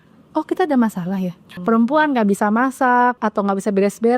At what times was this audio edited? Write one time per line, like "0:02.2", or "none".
0:01.5
0:03.2